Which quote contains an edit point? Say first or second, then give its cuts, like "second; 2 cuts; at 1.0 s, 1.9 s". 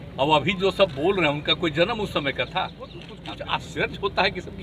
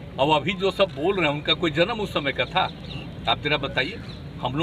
first; 1 cut; at 3.1 s